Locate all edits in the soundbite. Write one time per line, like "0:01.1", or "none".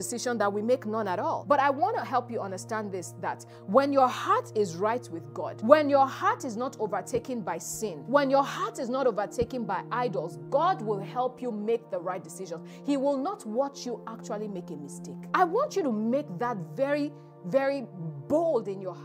0:01.4
0:05.4
0:08.0
0:15.2